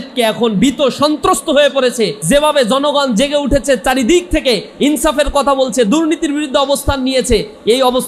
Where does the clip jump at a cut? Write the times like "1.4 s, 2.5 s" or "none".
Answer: 2.2 s